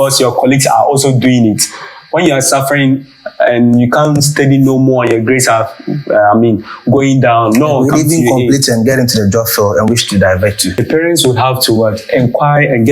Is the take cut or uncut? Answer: cut